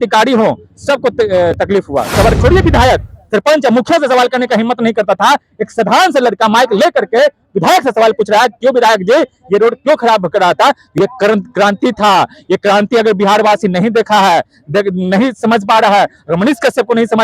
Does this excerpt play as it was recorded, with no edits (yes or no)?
no